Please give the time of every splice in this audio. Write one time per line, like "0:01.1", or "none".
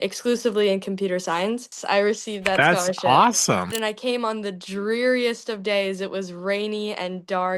0:01.7
0:03.8